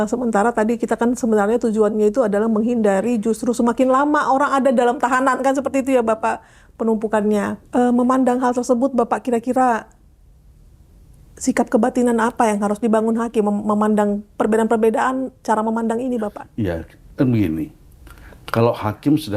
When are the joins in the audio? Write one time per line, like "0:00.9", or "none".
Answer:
none